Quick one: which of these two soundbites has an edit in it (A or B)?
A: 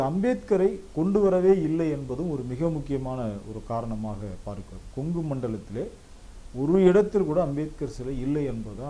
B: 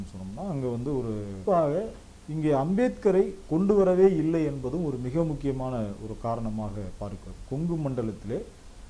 B